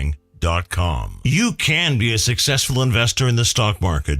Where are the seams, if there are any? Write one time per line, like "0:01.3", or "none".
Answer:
0:01.0